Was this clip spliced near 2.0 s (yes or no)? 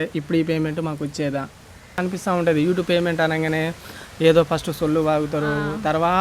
yes